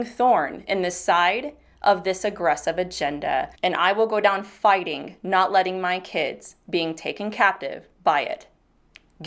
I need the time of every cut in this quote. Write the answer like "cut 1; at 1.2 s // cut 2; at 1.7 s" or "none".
none